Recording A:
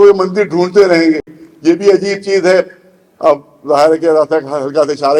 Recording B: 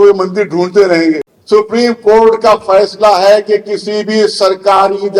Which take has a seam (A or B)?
B